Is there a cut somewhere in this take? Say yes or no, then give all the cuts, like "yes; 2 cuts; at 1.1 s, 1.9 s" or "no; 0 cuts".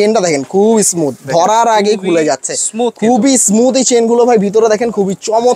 no; 0 cuts